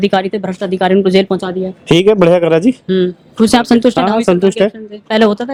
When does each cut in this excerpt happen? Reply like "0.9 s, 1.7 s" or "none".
none